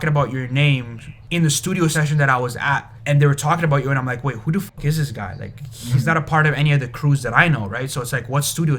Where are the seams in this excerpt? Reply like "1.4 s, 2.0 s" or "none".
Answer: 1.2 s, 2.9 s